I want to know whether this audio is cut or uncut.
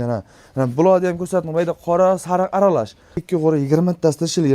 cut